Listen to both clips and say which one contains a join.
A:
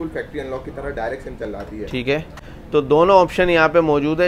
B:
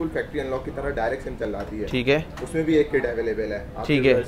A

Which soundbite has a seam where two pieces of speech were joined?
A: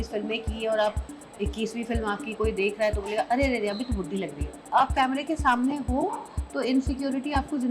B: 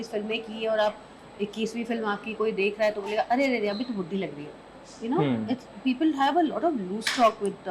A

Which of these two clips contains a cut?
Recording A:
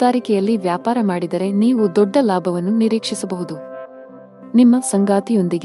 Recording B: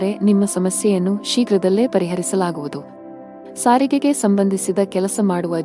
B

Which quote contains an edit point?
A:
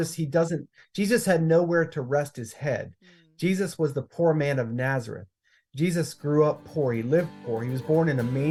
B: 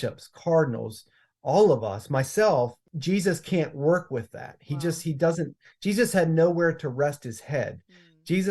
B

